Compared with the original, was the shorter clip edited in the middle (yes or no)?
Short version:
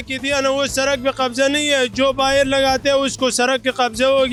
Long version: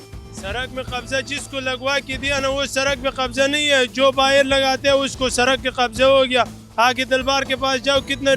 no